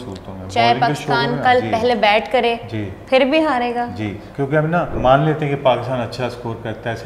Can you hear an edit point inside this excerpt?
yes; 1 cut; at 5.0 s

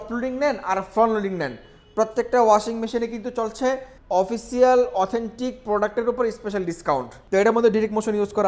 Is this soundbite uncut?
no; 2 cuts; at 3.9 s, 7.2 s

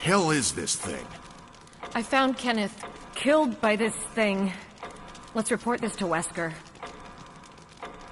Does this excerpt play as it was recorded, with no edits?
no; 1 cut; at 6.7 s

